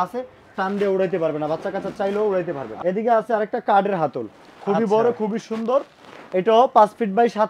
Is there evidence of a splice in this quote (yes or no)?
yes